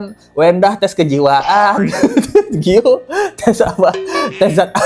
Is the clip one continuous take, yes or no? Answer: yes